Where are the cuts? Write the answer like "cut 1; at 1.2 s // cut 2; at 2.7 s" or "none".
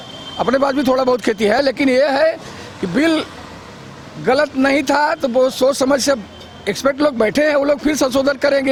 none